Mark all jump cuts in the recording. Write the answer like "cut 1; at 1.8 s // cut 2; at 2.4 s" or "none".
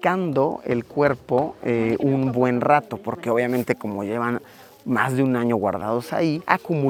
none